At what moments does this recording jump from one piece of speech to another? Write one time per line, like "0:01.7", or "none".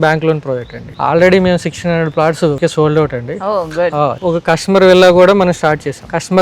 0:00.9
0:02.6
0:04.2